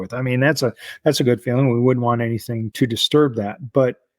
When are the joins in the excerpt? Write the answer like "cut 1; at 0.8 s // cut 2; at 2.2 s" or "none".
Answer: cut 1; at 2.7 s